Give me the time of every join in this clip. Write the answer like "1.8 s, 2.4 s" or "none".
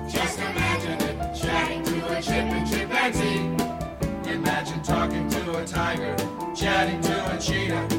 3.9 s